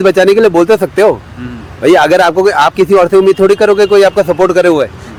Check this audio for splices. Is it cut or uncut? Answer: uncut